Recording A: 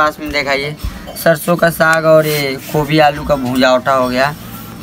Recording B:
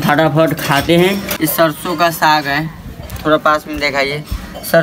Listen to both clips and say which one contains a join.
B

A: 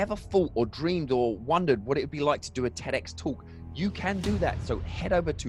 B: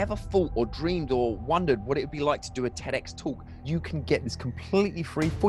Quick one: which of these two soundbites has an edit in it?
B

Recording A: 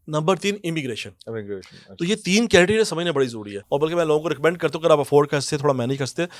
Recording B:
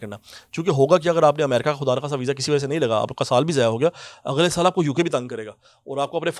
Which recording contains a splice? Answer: A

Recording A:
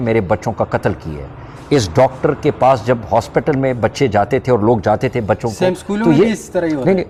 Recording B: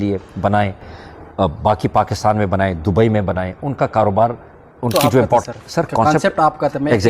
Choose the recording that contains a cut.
B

